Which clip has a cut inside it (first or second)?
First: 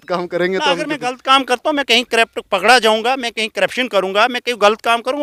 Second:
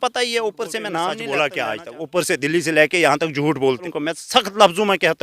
second